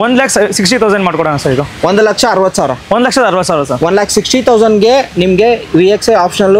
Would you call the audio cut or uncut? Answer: uncut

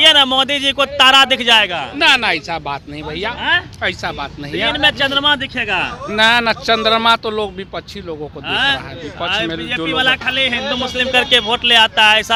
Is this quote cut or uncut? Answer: uncut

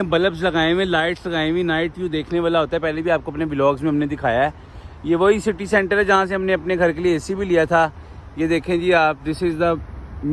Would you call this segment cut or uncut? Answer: uncut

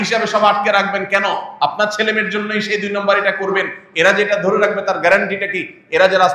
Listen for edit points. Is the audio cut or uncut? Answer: uncut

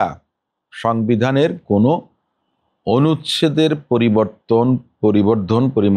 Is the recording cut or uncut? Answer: uncut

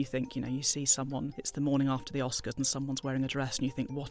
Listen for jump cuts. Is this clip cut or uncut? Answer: cut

